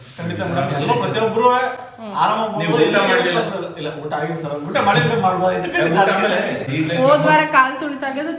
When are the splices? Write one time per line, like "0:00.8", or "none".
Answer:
none